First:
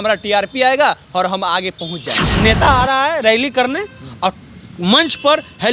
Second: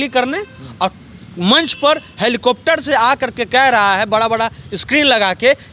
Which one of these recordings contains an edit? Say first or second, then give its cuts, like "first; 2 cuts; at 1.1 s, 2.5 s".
first; 1 cut; at 2.2 s